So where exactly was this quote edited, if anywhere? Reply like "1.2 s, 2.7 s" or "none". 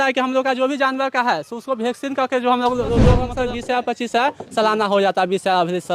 3.3 s